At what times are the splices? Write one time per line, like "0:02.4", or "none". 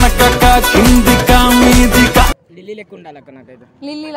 0:02.4